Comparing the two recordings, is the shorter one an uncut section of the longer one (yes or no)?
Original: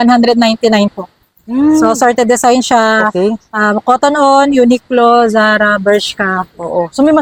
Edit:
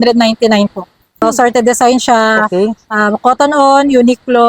no